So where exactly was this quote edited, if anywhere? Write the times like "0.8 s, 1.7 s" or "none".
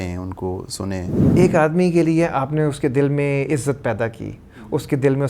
1.2 s